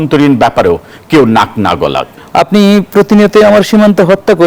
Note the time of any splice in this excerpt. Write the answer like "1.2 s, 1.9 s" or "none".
2.1 s